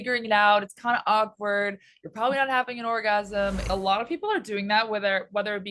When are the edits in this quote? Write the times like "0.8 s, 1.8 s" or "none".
3.6 s

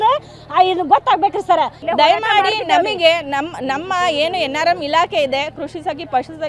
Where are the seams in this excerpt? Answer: 1.8 s

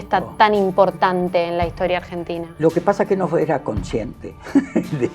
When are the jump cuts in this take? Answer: 2.4 s

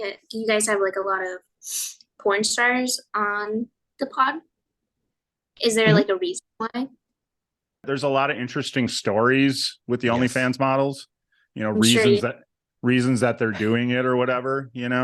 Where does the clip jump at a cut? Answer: 7.8 s

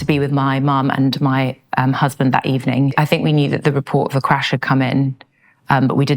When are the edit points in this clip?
2.9 s

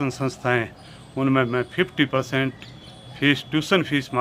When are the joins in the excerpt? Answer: none

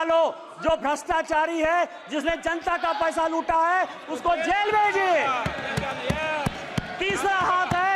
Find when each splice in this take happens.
none

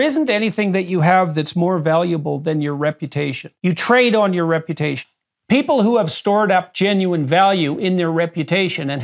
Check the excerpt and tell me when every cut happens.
3.4 s, 5.0 s

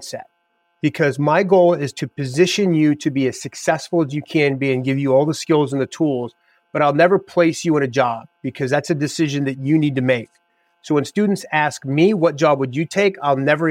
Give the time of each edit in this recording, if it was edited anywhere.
none

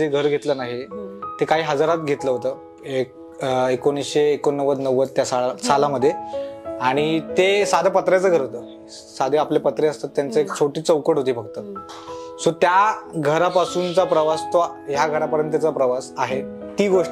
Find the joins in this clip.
none

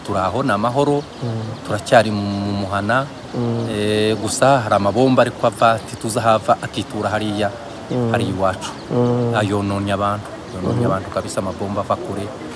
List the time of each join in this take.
none

